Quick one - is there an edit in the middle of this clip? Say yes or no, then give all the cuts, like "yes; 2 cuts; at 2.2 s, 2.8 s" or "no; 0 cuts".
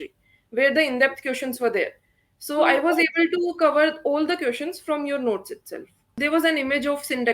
yes; 1 cut; at 6.1 s